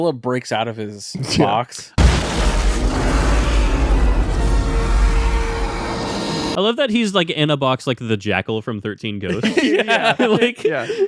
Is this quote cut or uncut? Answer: uncut